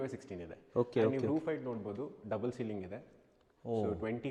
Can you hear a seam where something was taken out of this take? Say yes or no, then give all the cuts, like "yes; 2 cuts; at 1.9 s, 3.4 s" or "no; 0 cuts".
no; 0 cuts